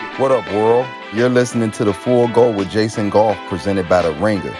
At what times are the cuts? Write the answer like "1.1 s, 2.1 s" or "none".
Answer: 1.0 s

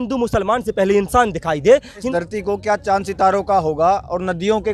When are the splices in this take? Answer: 2.1 s

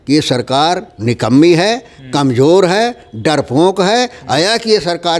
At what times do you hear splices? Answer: none

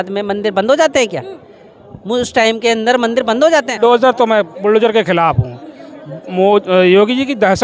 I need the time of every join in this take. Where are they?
3.8 s

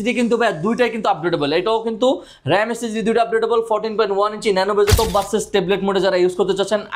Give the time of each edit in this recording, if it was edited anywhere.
4.9 s

